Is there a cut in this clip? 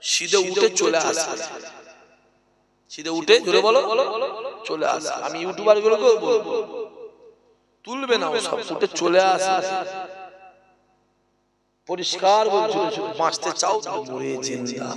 yes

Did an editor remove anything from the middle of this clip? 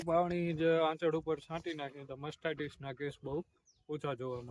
no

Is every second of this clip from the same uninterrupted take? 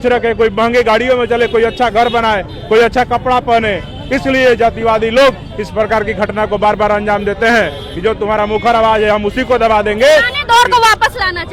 yes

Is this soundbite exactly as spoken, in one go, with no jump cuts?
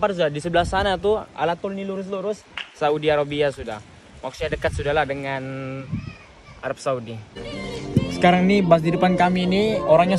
no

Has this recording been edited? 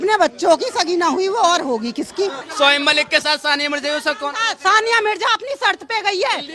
yes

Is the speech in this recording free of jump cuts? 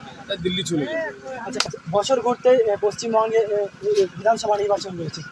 no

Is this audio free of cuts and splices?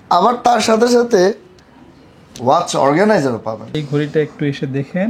no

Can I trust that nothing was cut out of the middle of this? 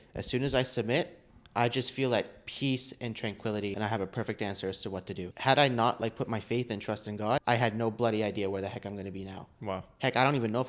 no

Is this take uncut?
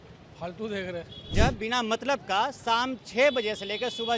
no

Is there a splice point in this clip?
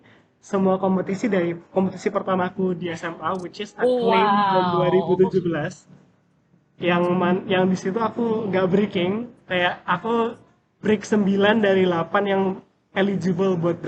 no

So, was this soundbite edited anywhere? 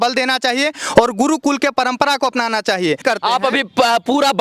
yes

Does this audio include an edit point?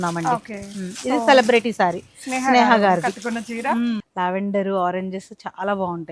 yes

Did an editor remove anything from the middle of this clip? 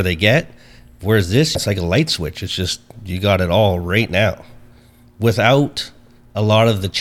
yes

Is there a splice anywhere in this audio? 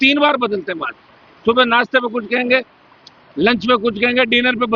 no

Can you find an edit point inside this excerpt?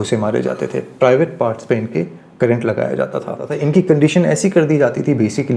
yes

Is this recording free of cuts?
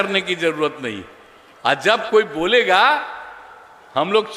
yes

